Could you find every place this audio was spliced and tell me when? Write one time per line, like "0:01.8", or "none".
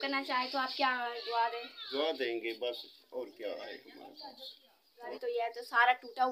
0:05.1